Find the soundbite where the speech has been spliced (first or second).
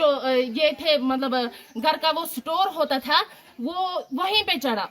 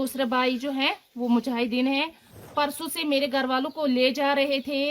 second